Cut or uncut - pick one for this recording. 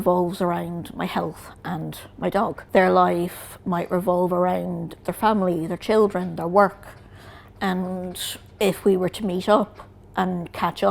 cut